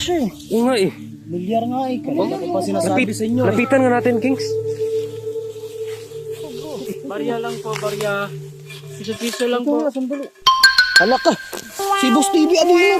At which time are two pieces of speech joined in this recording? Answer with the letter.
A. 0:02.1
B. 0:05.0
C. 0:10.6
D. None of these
D